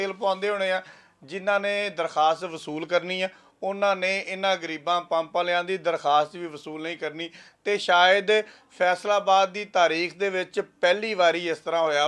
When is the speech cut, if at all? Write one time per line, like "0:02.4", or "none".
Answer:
none